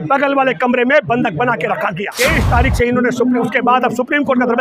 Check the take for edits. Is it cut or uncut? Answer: cut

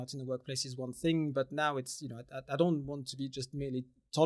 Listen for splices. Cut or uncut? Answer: uncut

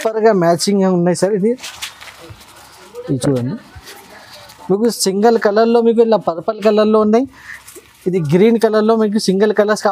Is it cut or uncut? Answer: uncut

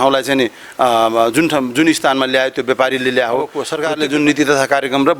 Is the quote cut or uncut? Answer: cut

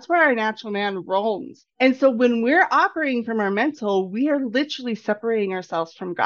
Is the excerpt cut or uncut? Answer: cut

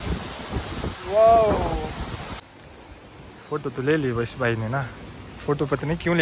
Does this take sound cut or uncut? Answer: cut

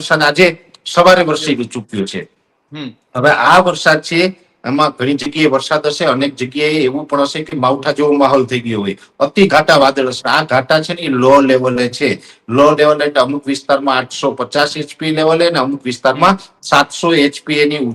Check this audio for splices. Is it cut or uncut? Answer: uncut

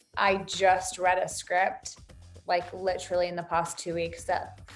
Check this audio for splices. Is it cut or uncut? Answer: uncut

